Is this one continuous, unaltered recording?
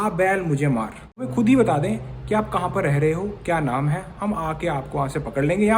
no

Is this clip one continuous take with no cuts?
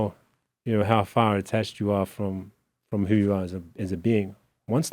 yes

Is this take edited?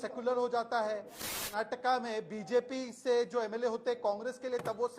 yes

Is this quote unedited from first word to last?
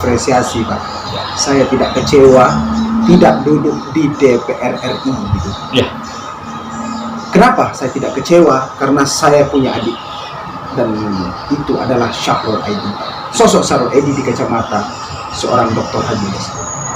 yes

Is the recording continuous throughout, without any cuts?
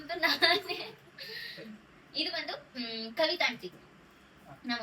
yes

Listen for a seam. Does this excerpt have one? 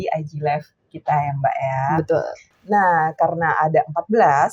no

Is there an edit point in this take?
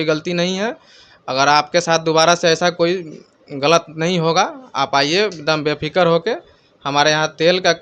no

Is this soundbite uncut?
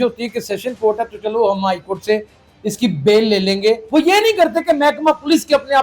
no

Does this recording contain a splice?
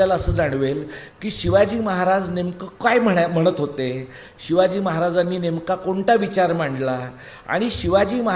no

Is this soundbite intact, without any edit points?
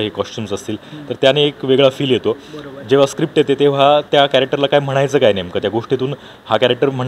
yes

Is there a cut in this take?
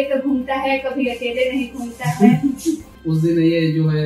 yes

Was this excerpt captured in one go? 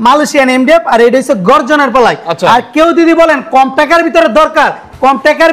yes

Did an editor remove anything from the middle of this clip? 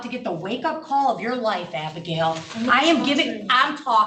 no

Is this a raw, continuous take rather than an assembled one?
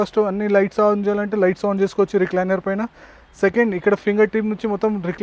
yes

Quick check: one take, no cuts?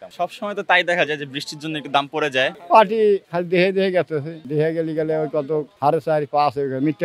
no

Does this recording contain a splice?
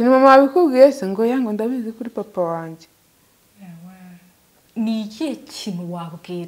yes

